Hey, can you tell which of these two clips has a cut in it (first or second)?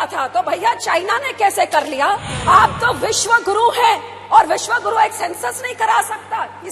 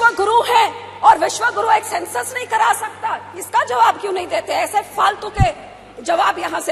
first